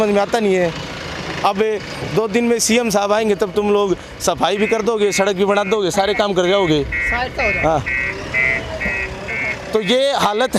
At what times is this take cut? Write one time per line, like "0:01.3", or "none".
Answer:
none

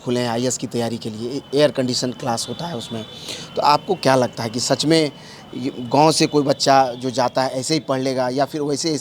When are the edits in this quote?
none

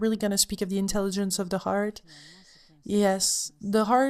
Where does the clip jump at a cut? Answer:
none

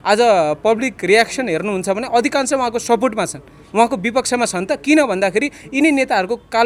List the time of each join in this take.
none

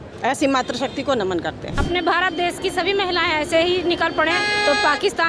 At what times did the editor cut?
0:01.7

